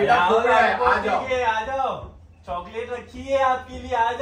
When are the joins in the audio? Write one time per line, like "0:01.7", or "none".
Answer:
none